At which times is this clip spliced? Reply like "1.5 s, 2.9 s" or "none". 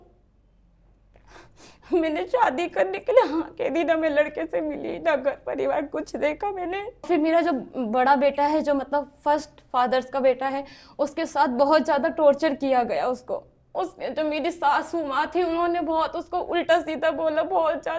7.1 s